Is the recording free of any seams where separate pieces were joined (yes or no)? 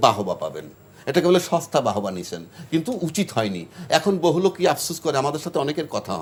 yes